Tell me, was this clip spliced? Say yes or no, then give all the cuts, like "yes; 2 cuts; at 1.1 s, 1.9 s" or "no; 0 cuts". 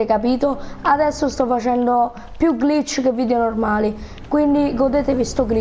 no; 0 cuts